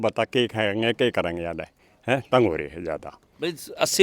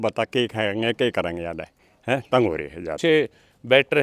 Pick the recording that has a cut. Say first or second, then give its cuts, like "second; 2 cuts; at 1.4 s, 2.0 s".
second; 1 cut; at 3.0 s